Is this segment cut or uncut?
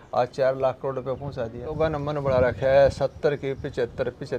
cut